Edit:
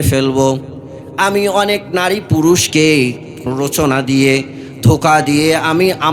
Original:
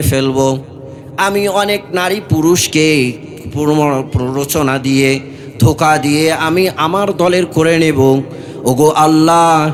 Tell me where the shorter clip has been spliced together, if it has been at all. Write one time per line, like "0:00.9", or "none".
0:03.4